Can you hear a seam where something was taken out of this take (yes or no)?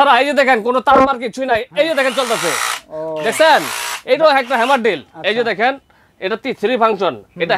no